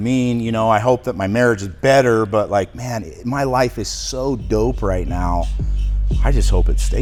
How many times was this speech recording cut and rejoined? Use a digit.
0